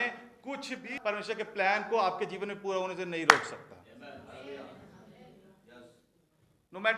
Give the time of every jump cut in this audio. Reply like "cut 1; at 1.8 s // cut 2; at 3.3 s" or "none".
cut 1; at 0.9 s